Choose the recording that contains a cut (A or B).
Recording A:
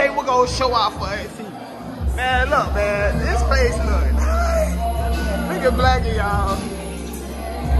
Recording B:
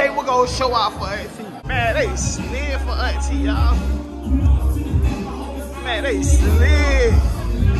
B